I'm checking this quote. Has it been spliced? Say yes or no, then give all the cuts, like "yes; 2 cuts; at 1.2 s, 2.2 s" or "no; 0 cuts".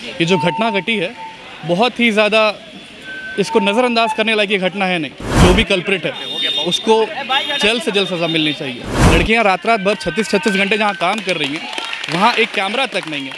yes; 2 cuts; at 5.4 s, 8.9 s